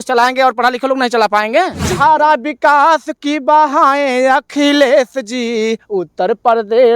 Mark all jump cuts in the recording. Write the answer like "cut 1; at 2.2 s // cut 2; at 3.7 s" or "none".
cut 1; at 1.9 s